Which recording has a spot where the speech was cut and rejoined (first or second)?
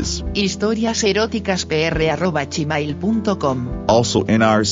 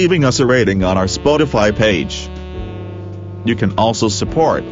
second